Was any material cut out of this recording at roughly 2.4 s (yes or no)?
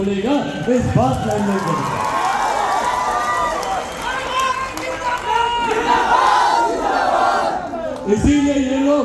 no